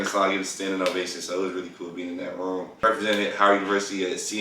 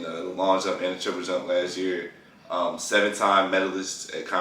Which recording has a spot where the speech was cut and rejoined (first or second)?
first